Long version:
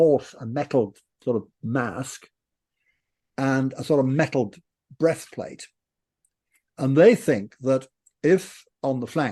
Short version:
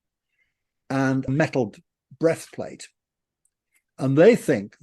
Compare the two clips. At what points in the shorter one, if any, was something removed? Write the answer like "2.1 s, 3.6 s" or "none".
1.3 s